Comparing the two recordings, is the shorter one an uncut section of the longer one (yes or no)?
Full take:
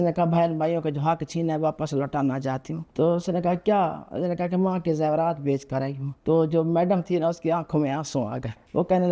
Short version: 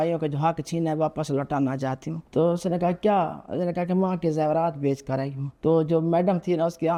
yes